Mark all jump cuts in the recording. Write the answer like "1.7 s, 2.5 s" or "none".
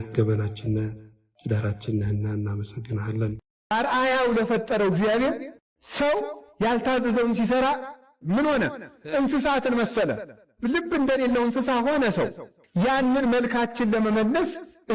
3.6 s